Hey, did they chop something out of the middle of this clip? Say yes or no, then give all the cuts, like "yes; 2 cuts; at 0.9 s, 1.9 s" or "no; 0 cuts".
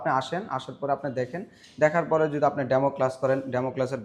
no; 0 cuts